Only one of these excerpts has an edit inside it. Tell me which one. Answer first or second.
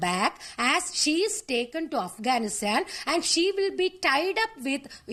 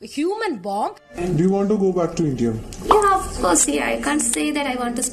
second